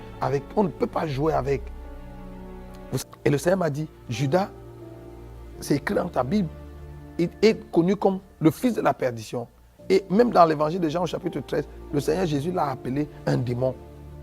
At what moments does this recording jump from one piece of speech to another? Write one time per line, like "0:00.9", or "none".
0:03.0

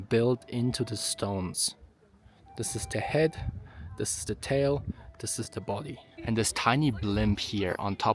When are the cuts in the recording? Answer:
0:06.0

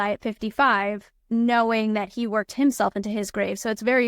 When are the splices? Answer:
0:01.1

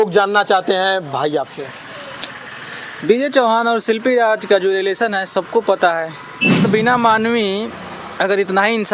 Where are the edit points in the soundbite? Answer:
0:06.7

